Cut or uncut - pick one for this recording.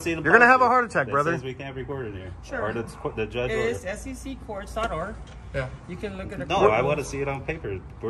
uncut